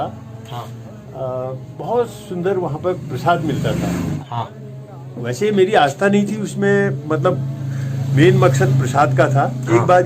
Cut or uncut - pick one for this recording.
cut